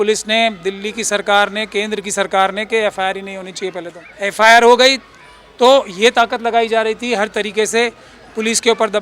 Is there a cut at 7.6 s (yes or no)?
no